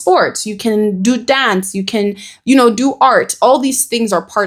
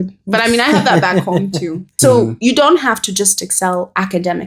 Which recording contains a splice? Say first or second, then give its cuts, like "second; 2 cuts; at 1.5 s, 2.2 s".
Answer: second; 1 cut; at 1.9 s